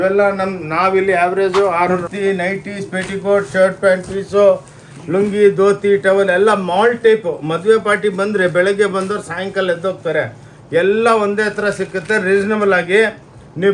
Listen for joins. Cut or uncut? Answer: cut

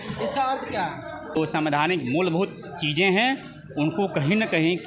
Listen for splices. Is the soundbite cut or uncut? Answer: cut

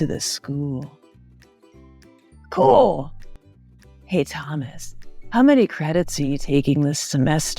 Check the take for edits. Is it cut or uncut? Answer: cut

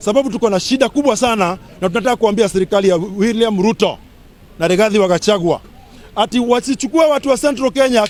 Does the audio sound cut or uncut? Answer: uncut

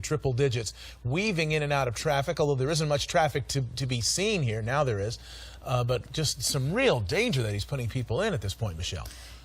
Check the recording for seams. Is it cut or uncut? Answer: cut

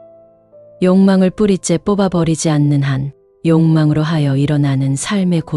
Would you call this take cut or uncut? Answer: uncut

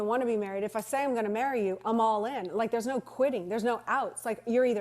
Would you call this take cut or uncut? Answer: cut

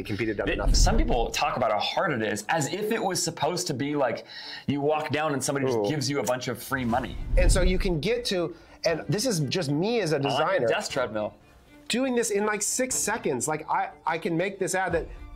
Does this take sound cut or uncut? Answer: cut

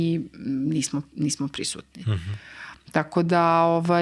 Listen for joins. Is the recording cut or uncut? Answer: uncut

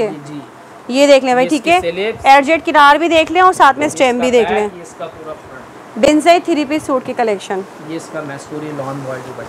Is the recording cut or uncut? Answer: uncut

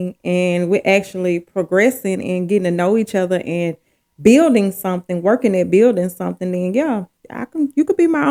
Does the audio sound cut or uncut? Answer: uncut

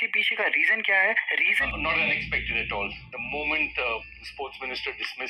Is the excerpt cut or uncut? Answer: cut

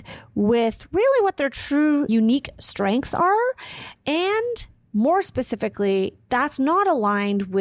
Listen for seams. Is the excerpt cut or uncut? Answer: cut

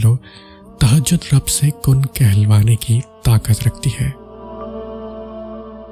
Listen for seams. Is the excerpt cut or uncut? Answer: cut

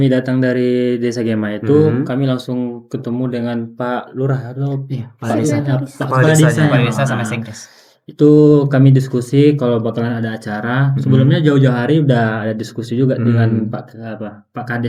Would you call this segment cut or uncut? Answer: uncut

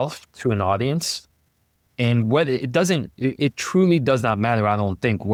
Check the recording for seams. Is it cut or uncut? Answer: uncut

